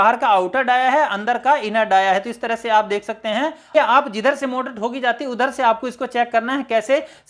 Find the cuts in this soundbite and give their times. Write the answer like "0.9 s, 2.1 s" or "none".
3.7 s